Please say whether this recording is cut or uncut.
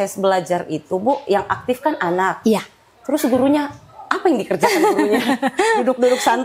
uncut